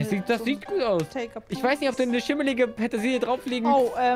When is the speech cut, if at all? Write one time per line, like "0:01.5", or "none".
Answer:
none